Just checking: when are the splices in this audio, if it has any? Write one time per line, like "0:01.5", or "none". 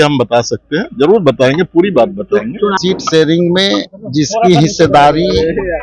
0:02.7